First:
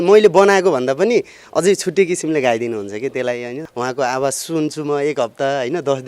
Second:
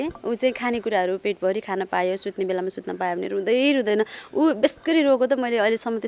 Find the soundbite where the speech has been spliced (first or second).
first